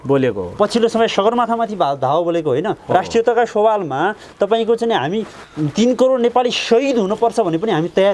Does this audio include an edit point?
no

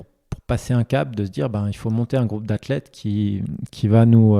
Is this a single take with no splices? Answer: yes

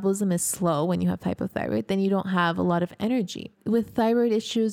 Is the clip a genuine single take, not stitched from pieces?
no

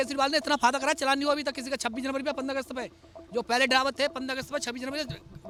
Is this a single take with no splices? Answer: yes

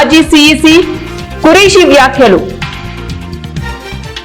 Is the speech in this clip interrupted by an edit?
yes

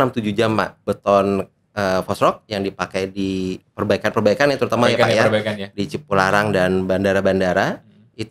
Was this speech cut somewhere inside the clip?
yes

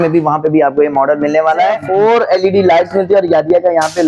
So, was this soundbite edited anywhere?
yes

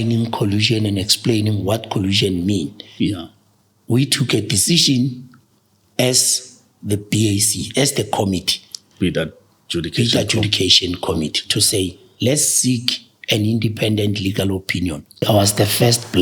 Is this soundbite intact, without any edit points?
no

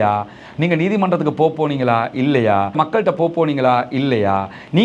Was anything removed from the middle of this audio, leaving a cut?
yes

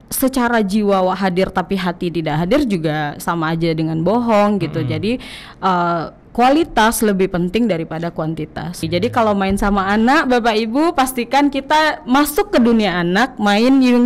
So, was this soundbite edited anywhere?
yes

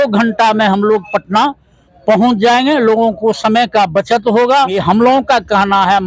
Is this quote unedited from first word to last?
no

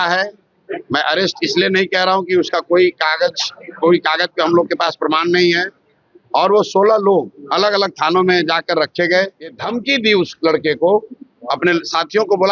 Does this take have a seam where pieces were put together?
yes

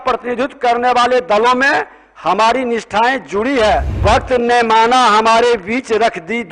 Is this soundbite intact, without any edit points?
no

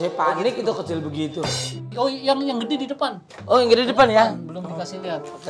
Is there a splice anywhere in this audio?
yes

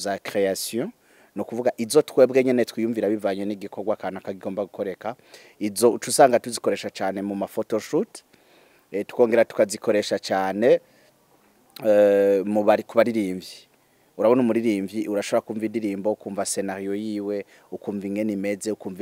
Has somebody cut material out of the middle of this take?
no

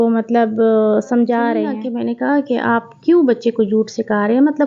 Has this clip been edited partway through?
yes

